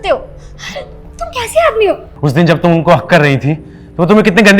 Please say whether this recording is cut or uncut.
cut